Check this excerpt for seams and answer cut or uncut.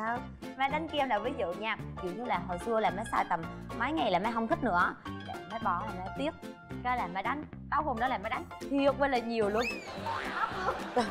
uncut